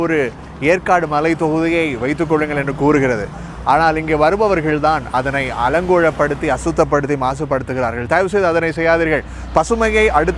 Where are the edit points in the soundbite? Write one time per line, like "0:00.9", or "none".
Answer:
none